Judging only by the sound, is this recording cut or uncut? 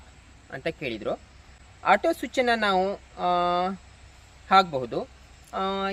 uncut